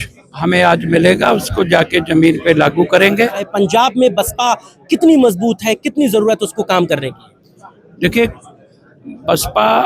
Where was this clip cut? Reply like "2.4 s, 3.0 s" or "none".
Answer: 3.5 s